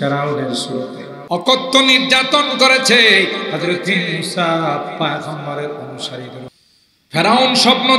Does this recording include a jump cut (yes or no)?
yes